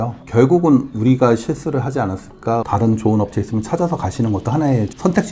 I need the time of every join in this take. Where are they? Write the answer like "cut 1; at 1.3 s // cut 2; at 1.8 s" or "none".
cut 1; at 2.4 s